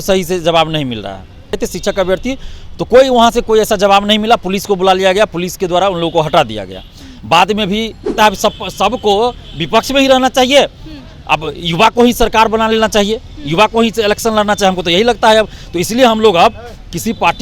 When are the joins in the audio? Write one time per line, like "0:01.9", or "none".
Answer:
0:01.6
0:08.1